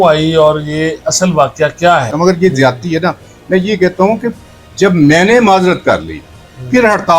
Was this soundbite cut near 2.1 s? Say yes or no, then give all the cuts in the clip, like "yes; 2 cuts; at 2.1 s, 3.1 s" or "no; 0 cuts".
yes; 1 cut; at 2.1 s